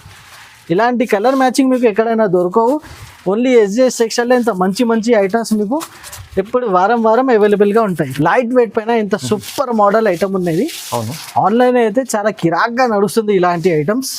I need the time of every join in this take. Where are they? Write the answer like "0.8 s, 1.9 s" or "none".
8.1 s